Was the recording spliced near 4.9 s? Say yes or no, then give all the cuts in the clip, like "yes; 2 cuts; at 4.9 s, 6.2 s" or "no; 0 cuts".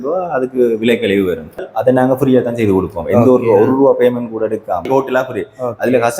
yes; 2 cuts; at 1.6 s, 4.9 s